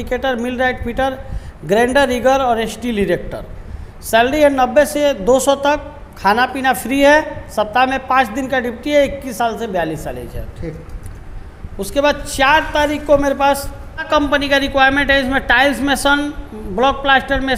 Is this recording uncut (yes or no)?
yes